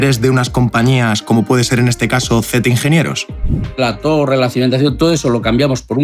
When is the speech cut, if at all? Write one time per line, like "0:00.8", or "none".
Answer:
0:03.8